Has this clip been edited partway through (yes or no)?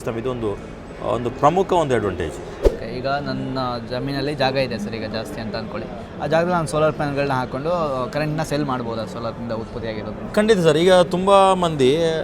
yes